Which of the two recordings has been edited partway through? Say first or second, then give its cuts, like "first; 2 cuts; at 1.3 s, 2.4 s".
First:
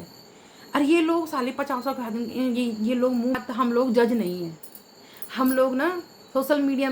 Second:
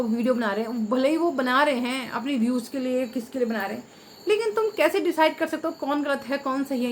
first; 1 cut; at 3.3 s